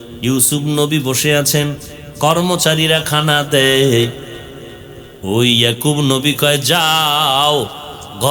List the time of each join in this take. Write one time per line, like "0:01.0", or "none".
none